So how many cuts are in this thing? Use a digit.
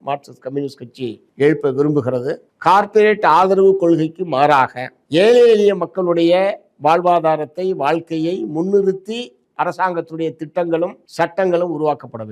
1